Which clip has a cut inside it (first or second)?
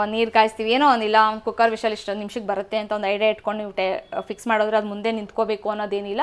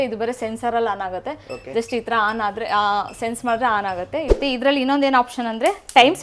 second